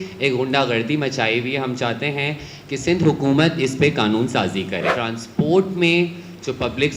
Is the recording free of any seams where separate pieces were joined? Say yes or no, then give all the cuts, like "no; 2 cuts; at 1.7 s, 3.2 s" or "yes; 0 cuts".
no; 1 cut; at 4.9 s